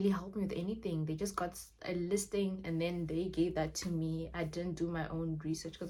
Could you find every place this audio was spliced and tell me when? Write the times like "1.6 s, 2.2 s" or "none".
none